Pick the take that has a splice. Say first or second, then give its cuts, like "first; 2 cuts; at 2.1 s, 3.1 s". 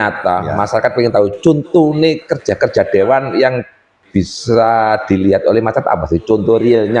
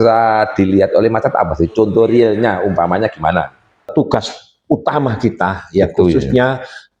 second; 1 cut; at 3.9 s